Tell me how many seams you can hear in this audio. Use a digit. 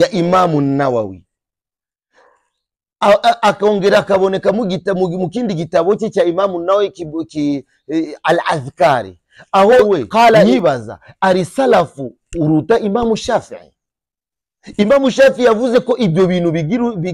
1